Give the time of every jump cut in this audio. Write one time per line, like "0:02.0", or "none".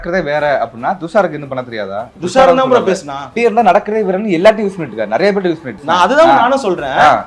0:02.0
0:03.4
0:05.7